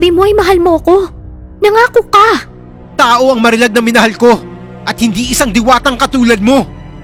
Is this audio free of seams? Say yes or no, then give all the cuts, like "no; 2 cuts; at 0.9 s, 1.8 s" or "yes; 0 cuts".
yes; 0 cuts